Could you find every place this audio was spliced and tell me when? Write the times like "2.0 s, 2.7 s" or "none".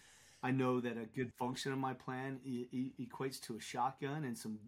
1.3 s